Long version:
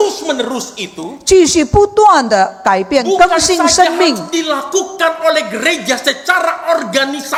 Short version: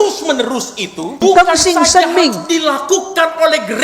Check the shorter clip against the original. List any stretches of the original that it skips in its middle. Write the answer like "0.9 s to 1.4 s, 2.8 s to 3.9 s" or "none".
1.2 s to 3.0 s